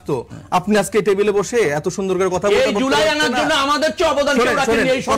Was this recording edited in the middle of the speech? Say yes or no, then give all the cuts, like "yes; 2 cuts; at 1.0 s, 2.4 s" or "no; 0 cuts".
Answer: no; 0 cuts